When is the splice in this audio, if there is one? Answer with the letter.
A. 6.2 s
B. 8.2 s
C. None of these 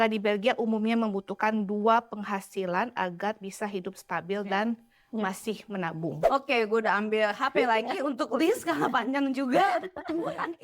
A